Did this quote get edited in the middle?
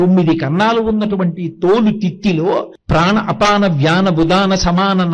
yes; 1 cut; at 2.8 s

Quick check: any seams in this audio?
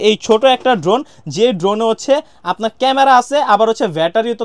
no; 0 cuts

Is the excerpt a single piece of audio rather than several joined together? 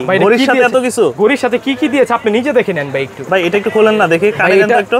yes; 0 cuts

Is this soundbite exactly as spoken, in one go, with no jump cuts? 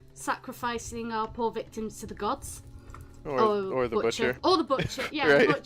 yes; 0 cuts

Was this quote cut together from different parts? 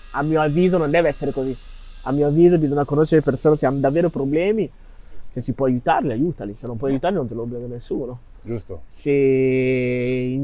no; 0 cuts

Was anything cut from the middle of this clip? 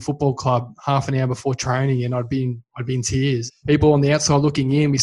yes; 1 cut; at 3.5 s

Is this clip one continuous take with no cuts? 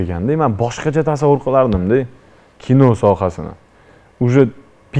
yes; 0 cuts

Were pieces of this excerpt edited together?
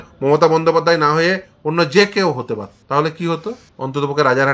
yes; 2 cuts; at 2.7 s, 3.7 s

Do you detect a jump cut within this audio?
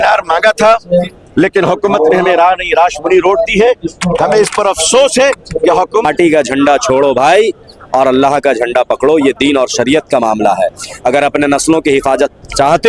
yes; 1 cut; at 6.0 s

